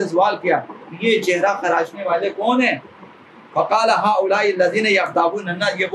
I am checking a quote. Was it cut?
no; 0 cuts

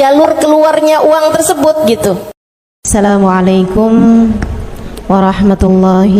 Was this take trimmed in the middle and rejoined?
yes; 1 cut; at 2.9 s

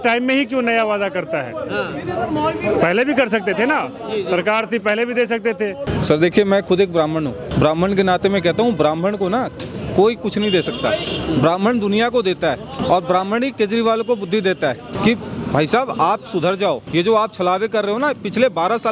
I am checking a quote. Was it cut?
yes; 5 cuts; at 5.9 s, 7.4 s, 12.7 s, 14.9 s, 16.8 s

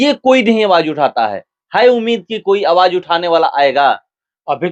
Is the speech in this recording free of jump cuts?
yes; 0 cuts

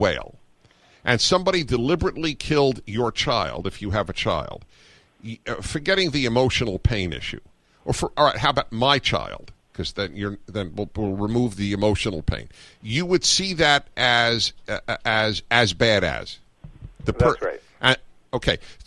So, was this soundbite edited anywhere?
no; 0 cuts

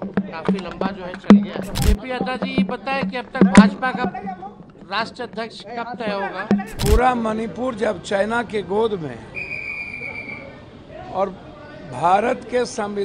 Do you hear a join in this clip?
yes; 2 cuts; at 1.9 s, 6.8 s

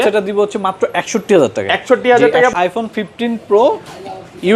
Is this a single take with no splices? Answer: no; 1 cut; at 2.5 s

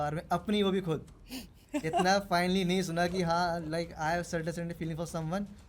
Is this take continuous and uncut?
yes; 0 cuts

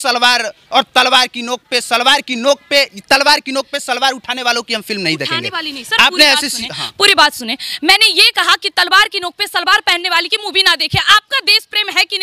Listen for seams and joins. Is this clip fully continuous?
yes; 0 cuts

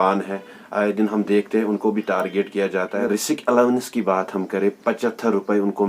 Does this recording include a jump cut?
yes; 1 cut; at 3.0 s

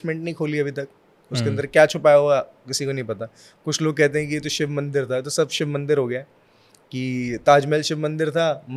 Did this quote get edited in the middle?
no; 0 cuts

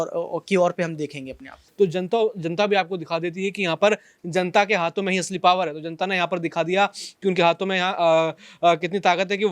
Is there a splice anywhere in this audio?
yes; 1 cut; at 1.7 s

